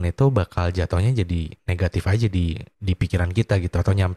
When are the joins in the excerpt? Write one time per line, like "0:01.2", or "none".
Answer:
0:02.7